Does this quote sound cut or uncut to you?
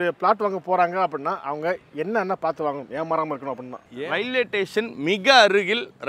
cut